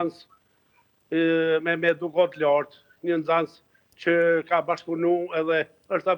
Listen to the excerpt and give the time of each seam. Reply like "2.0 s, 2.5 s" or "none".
none